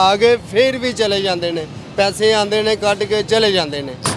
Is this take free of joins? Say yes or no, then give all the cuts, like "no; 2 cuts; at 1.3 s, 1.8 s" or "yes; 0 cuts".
yes; 0 cuts